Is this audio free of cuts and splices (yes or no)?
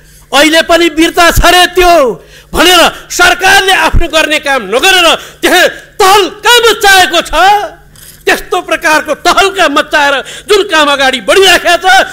yes